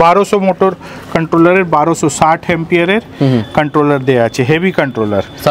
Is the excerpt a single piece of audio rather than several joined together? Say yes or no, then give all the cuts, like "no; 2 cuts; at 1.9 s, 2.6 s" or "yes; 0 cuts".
yes; 0 cuts